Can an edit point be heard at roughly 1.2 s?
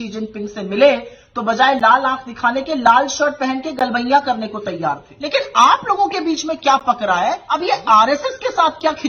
no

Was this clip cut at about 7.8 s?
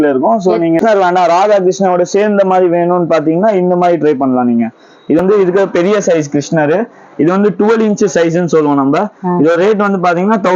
no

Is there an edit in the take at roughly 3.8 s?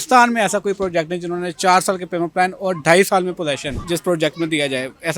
yes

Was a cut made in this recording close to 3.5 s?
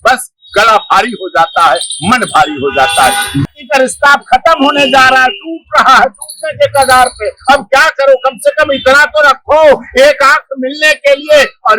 yes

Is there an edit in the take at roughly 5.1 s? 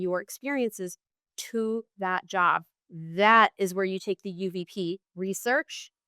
yes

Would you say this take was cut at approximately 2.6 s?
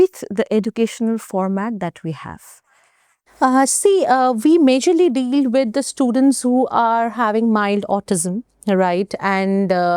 no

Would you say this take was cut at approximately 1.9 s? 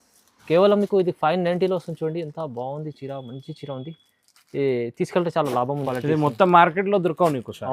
no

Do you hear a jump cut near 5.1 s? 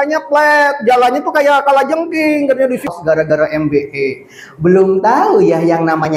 no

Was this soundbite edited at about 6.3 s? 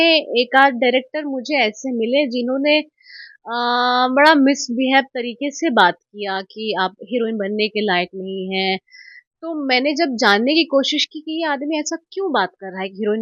no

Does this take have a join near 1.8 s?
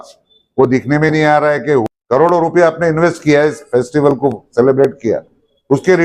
yes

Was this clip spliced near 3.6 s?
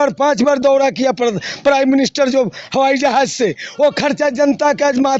no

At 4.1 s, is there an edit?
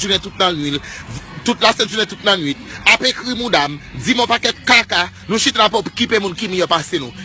yes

